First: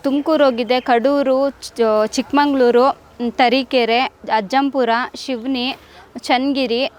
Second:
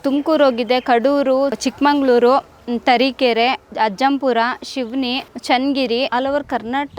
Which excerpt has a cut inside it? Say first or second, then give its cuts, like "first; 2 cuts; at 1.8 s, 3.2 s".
second; 3 cuts; at 1.6 s, 5.3 s, 6.1 s